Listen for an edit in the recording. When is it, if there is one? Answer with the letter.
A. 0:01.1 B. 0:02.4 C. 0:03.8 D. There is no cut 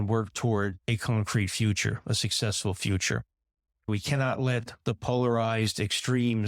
C